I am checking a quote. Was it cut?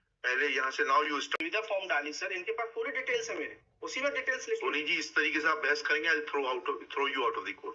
yes; 1 cut; at 1.3 s

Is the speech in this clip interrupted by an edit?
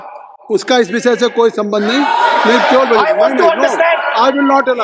no; 0 cuts

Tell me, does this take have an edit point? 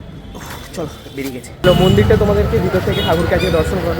yes; 1 cut; at 1.6 s

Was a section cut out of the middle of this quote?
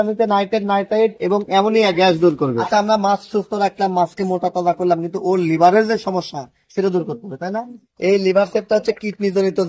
yes; 2 cuts; at 2.6 s, 7.8 s

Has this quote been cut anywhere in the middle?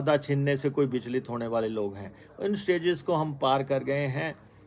no; 0 cuts

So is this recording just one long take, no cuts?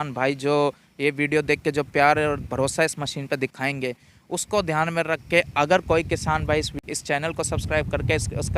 no; 1 cut; at 6.8 s

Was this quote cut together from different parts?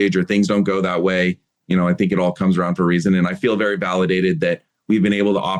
no; 0 cuts

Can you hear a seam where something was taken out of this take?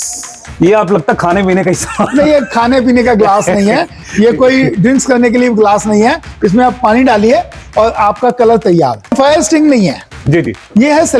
yes; 1 cut; at 9.1 s

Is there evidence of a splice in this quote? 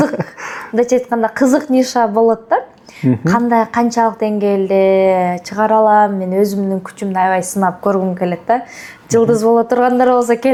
no; 0 cuts

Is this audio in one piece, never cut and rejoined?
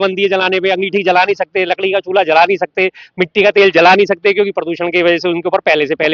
yes; 0 cuts

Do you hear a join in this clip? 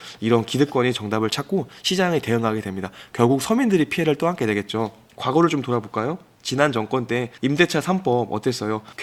no; 0 cuts

